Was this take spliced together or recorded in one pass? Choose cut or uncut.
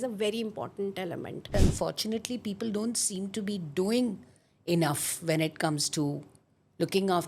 cut